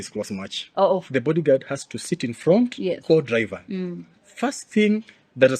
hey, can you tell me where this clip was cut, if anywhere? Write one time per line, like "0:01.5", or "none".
0:01.1